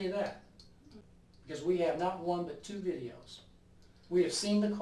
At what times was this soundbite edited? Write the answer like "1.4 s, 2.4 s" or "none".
1.0 s